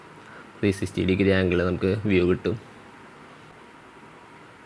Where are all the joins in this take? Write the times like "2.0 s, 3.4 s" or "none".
3.4 s